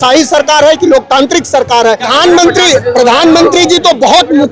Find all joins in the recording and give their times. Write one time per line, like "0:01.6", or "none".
0:02.1

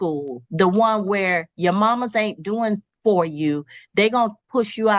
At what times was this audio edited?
none

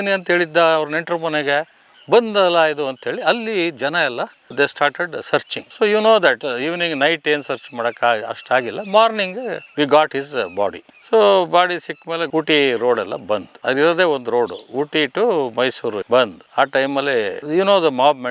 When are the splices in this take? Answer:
none

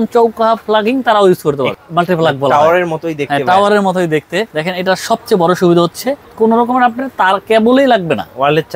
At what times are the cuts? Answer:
0:01.8
0:04.5
0:06.2

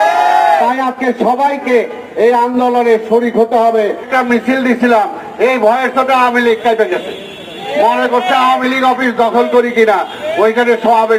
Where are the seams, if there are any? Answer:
0:04.1

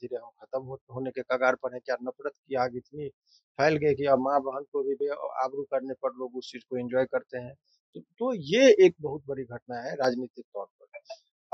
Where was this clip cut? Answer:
none

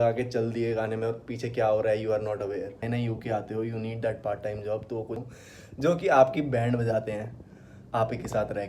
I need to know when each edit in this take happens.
0:02.8
0:05.2

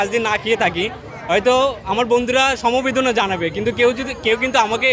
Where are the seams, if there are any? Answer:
none

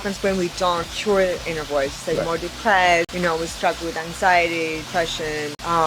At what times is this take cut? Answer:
0:00.9
0:03.1
0:05.0

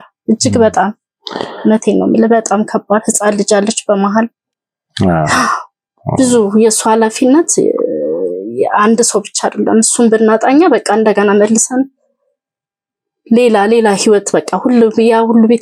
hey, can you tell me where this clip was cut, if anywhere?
none

